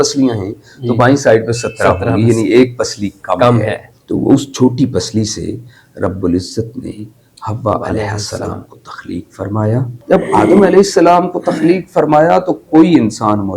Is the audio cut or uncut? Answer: cut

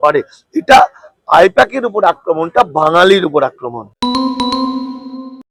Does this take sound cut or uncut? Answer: uncut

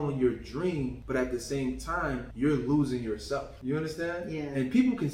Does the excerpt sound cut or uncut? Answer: cut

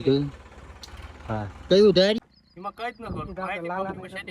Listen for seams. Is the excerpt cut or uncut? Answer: cut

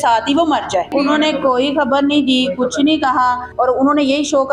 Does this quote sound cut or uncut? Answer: cut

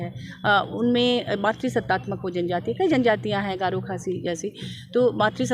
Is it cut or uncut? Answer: uncut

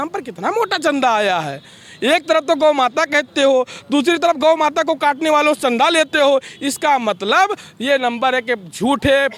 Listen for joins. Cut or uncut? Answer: uncut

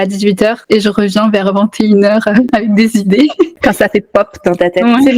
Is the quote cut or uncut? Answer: cut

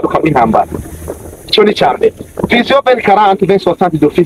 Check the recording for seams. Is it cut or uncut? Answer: uncut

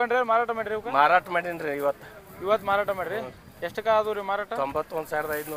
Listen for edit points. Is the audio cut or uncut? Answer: uncut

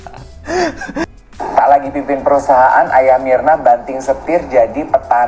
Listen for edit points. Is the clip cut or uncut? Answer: cut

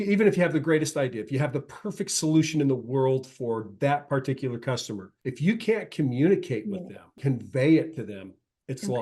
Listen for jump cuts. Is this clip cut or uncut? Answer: cut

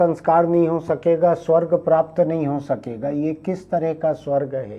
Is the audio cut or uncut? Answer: uncut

